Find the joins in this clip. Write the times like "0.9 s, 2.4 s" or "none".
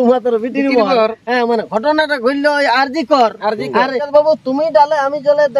4.1 s

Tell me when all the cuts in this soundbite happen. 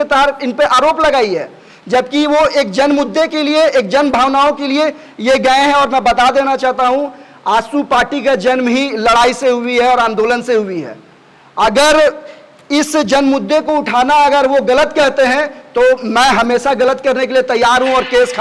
none

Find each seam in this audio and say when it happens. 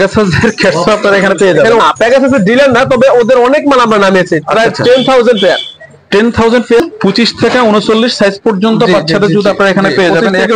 1.8 s, 6.8 s

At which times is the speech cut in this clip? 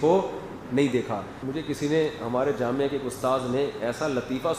1.3 s

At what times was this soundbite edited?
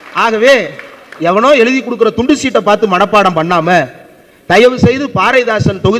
1.1 s

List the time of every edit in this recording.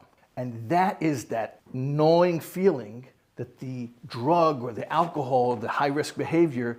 none

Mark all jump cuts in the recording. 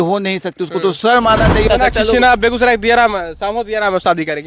1.6 s

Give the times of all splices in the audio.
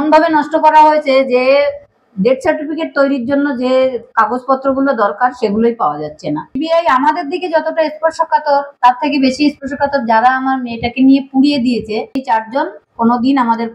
6.5 s, 12.2 s

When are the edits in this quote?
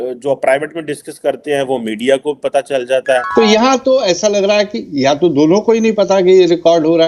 3.3 s

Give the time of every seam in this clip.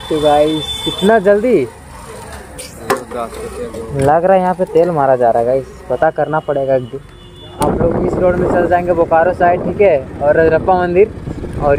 7.6 s

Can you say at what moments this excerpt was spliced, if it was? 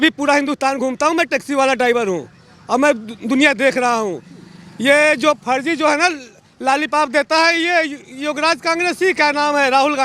none

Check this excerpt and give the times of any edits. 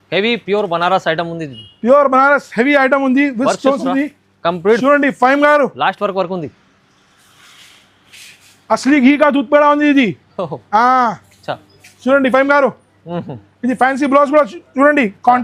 none

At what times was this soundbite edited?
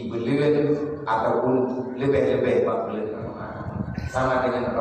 3.4 s

